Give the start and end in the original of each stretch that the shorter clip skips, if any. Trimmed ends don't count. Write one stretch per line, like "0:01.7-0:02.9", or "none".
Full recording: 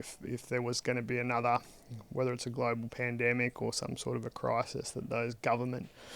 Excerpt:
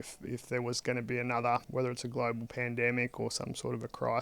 0:01.7-0:02.1